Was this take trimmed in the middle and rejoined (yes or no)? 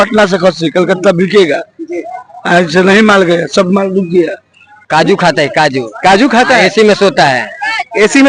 yes